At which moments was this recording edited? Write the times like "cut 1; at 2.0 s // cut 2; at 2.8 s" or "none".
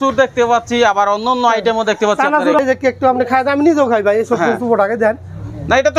cut 1; at 2.6 s